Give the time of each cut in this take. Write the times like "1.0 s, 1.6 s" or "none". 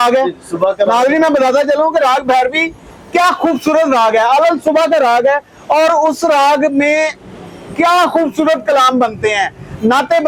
none